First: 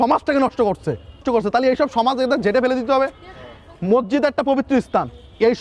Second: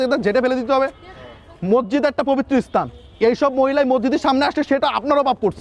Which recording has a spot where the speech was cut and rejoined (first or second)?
first